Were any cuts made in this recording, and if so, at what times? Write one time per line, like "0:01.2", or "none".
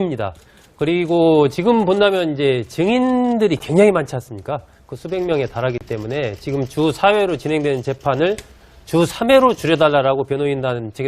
0:03.6